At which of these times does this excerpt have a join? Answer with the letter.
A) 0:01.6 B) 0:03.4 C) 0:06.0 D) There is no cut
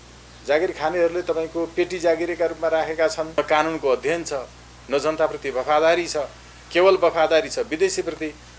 B